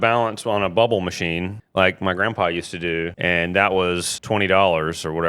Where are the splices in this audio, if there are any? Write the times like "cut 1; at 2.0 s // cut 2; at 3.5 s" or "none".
cut 1; at 1.6 s // cut 2; at 3.1 s // cut 3; at 4.1 s